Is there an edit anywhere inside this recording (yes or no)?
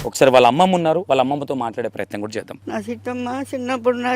yes